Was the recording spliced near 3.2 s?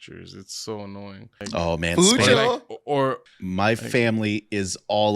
yes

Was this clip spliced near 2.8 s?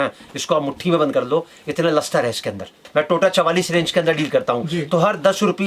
yes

